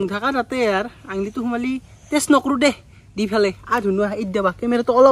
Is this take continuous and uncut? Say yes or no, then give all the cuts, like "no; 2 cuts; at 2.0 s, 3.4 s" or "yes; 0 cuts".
yes; 0 cuts